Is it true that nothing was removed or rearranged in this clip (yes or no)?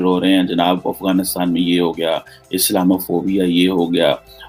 yes